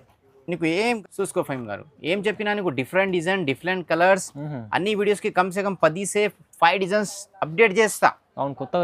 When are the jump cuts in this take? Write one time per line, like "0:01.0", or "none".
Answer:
0:01.0